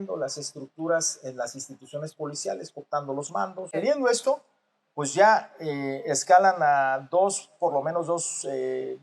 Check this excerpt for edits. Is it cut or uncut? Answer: cut